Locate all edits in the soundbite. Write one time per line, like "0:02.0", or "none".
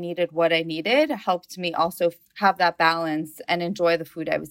0:03.4